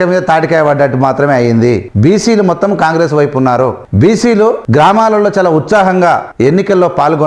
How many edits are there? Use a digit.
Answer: 4